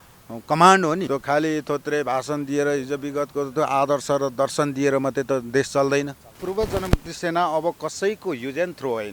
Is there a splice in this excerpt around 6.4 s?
yes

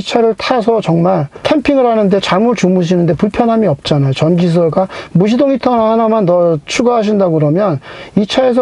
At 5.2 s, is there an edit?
no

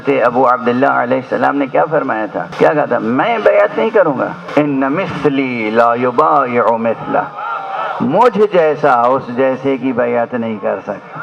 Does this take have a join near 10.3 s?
no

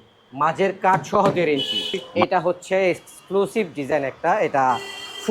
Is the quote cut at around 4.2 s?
no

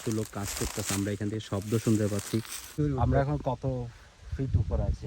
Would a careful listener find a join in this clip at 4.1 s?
no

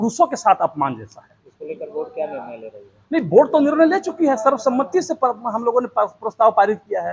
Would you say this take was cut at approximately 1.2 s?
no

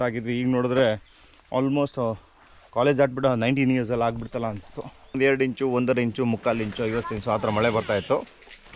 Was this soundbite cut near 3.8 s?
no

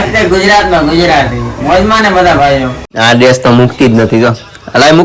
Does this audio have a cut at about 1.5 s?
no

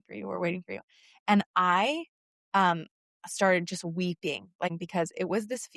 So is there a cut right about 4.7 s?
yes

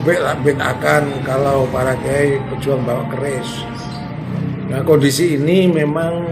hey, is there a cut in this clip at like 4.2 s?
yes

